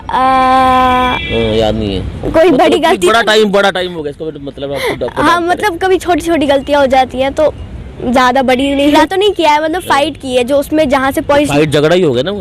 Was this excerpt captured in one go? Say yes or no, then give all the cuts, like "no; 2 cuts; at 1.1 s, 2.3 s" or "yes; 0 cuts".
no; 1 cut; at 9.0 s